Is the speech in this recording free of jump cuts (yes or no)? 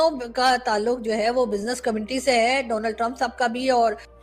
yes